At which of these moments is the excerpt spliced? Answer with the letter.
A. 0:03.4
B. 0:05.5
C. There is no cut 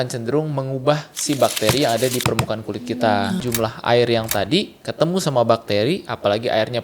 A